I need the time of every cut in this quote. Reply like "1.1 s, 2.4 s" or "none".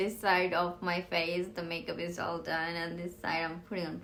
none

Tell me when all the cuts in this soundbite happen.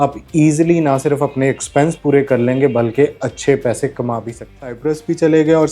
4.6 s

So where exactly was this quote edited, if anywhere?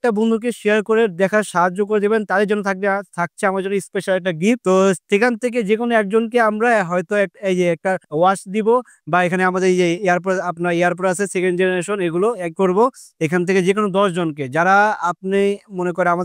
none

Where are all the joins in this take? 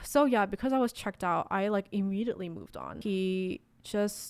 3.0 s

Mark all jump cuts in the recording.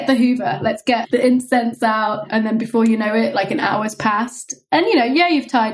1.0 s, 2.2 s

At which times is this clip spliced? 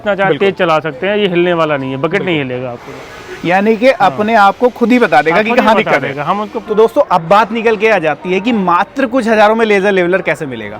2.8 s, 6.5 s

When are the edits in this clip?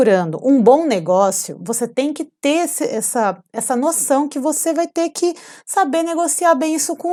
none

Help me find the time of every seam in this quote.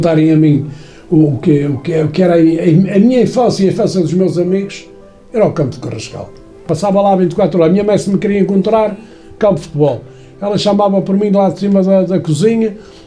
6.7 s

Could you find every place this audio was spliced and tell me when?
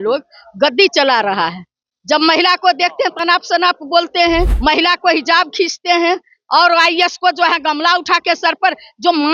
4.5 s

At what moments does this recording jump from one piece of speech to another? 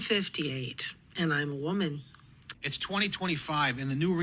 2.6 s

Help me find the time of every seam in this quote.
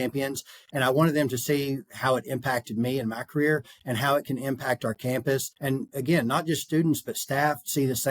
5.5 s

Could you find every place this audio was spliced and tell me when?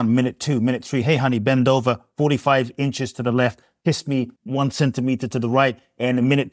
4.4 s

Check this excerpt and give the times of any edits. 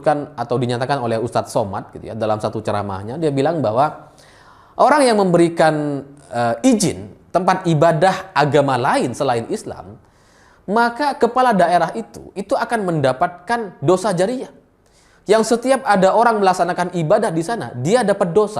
none

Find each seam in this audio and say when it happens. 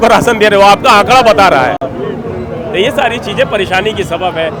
none

